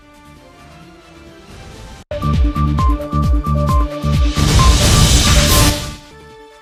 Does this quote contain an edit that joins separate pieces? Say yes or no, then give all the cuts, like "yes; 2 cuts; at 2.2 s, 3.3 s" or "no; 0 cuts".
no; 0 cuts